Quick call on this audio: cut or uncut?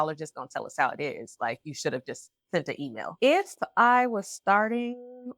cut